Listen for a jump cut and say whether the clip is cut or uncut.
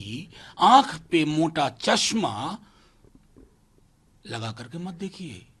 uncut